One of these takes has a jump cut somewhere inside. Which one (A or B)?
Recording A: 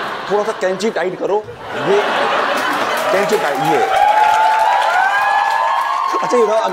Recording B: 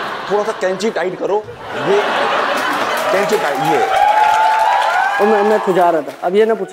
B